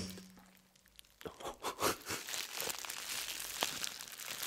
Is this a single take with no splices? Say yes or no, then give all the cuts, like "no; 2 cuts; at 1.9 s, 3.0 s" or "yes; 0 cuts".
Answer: yes; 0 cuts